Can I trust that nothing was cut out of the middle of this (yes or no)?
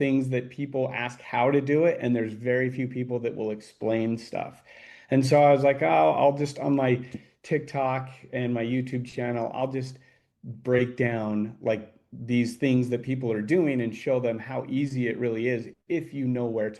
yes